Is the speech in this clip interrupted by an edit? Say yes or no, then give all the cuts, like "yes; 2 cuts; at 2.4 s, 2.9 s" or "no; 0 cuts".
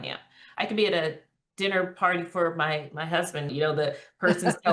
yes; 1 cut; at 3.5 s